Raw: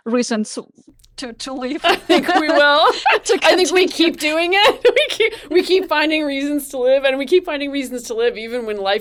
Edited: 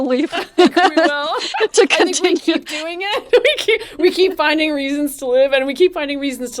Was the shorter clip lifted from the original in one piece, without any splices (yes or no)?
yes